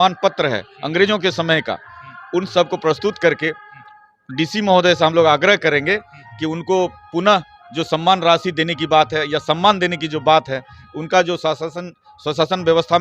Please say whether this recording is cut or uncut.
uncut